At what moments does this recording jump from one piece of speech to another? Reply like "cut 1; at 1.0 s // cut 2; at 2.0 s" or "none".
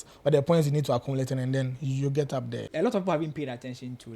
cut 1; at 2.7 s